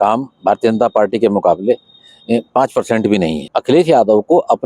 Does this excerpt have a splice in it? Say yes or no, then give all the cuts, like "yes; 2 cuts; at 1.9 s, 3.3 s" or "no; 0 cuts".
yes; 1 cut; at 3.5 s